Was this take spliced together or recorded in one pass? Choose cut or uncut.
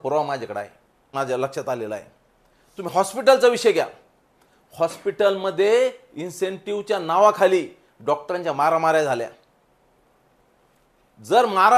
cut